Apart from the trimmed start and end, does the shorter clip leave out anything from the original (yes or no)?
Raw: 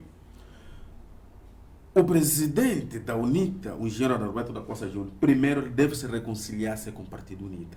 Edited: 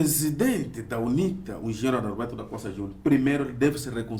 no